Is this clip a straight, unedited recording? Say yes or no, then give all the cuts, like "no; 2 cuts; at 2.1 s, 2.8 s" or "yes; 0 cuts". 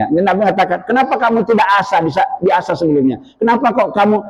yes; 0 cuts